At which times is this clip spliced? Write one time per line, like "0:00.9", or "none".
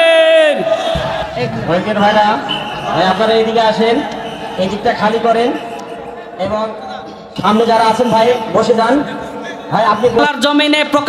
0:01.2
0:10.2